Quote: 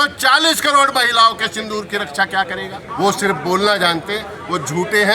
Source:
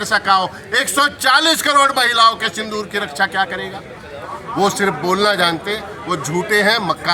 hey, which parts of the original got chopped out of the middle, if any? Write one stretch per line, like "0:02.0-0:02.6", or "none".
0:03.8-0:04.4